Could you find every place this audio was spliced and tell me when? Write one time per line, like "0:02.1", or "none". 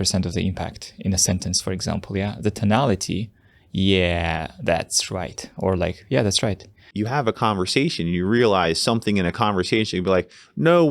0:06.9